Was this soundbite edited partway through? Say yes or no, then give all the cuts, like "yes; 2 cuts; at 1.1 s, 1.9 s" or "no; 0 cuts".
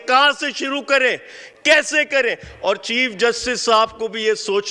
no; 0 cuts